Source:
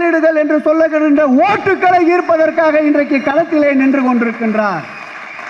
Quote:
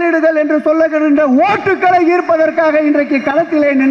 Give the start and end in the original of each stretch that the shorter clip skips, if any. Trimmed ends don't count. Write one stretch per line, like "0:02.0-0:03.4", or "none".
none